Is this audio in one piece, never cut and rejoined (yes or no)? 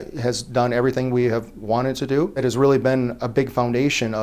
no